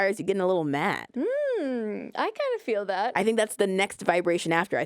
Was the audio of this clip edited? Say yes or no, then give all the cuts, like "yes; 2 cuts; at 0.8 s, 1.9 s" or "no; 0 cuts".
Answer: yes; 1 cut; at 1.1 s